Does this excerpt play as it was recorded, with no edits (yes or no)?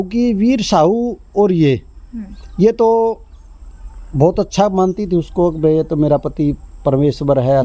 yes